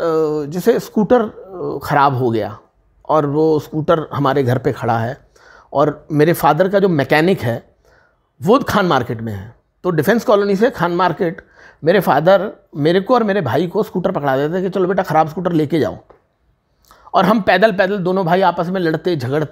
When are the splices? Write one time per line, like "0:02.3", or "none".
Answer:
none